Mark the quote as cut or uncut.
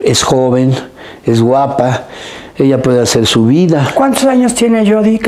uncut